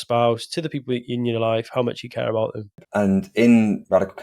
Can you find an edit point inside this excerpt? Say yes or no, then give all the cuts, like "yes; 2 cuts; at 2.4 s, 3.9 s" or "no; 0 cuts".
yes; 1 cut; at 2.7 s